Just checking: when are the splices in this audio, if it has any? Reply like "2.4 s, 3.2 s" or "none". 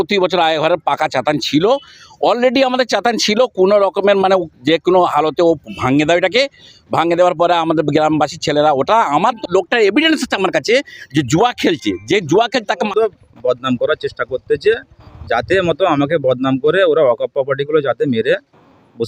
9.4 s, 12.8 s